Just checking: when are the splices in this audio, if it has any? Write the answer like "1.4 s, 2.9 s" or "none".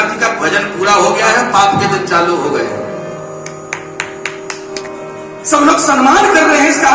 4.8 s